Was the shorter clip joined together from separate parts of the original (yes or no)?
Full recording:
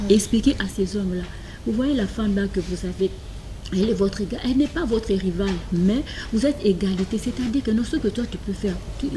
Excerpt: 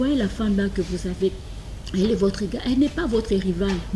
no